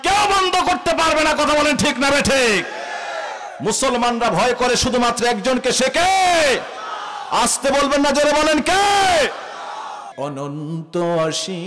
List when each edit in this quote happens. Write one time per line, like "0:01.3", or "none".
0:10.1